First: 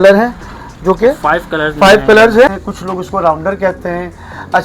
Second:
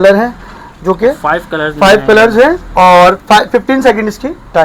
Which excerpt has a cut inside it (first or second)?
first